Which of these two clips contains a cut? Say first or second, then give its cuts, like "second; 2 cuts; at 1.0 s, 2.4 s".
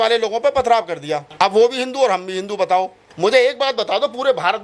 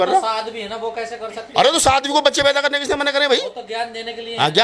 first; 2 cuts; at 1.2 s, 3.0 s